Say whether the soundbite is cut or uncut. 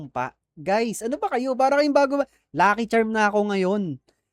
uncut